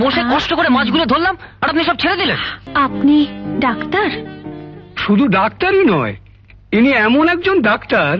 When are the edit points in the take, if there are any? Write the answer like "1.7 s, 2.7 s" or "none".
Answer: 2.6 s